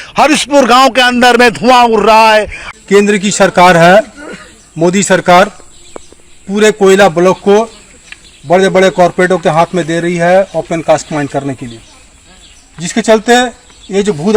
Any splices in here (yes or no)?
yes